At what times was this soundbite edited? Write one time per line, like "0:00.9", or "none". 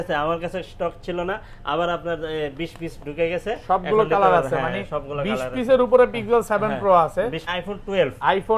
0:07.5